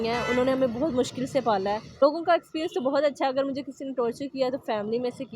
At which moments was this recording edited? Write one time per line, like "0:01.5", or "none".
0:01.9

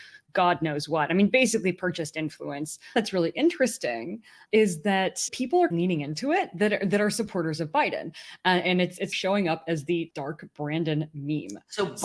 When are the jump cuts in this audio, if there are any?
0:03.0
0:05.3
0:10.1

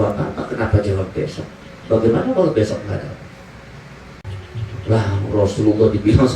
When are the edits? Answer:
0:04.2

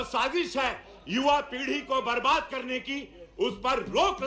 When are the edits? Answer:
none

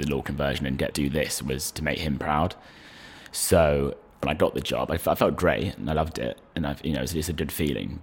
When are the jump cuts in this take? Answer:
0:00.9
0:04.2

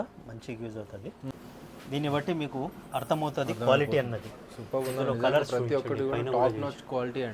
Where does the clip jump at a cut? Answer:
0:01.2

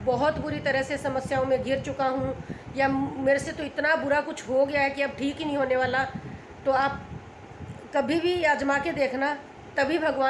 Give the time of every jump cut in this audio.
none

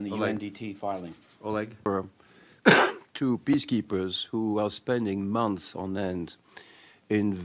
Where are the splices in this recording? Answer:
0:02.3

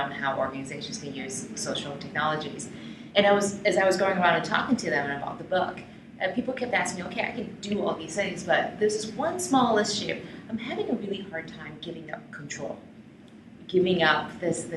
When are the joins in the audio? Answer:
0:05.8

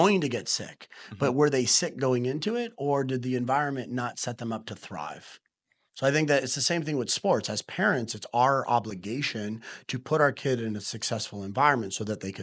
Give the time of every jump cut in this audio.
none

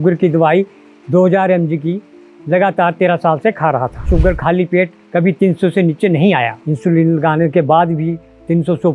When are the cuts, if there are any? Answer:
0:04.1
0:06.6

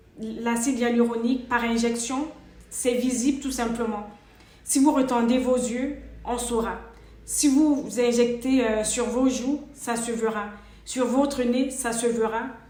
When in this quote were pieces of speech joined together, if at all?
none

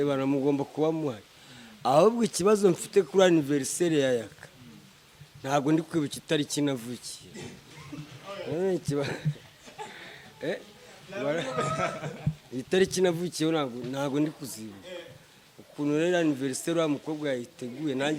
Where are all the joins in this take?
none

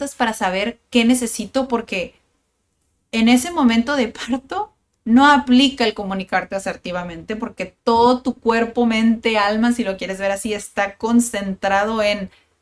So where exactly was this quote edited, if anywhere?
none

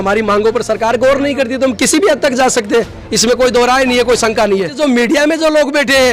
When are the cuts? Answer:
0:04.7

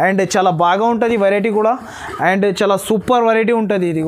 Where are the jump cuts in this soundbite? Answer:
none

